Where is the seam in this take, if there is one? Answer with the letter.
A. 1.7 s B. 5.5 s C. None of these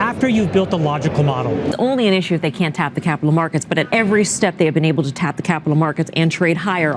A